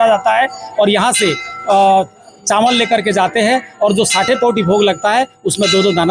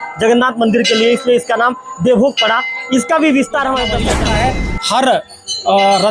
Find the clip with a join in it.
second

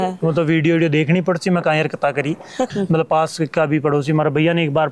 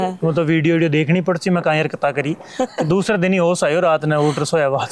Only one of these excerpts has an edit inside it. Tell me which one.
first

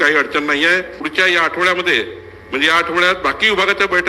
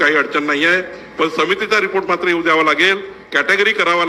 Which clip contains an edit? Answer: first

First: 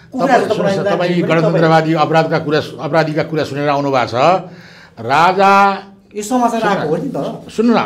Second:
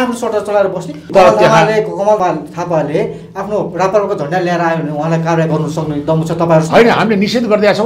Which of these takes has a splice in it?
second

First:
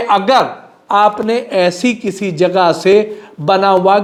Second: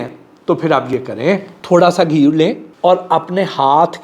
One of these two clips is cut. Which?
second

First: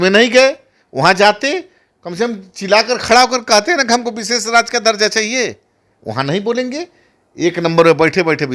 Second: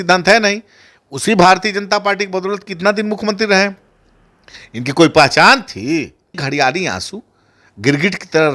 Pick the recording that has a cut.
second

